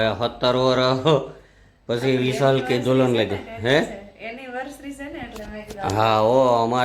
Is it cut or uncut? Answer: uncut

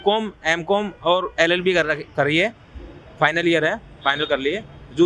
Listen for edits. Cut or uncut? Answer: uncut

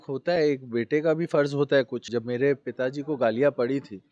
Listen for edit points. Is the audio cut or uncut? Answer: cut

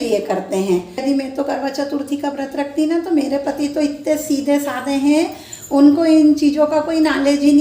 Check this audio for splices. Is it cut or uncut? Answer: cut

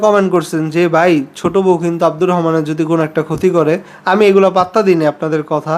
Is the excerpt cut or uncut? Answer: uncut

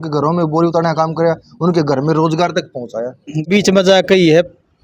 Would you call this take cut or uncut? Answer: cut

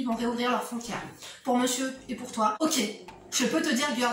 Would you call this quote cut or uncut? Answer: cut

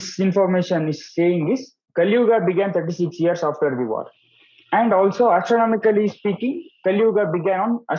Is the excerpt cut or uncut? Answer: uncut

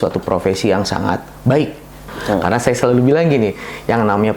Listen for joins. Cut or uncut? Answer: cut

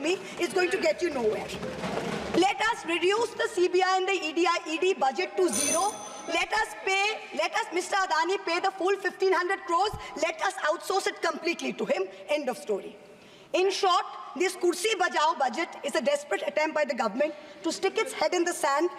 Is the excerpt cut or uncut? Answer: uncut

